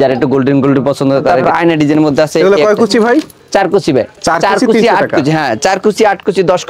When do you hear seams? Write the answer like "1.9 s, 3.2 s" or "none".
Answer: 1.3 s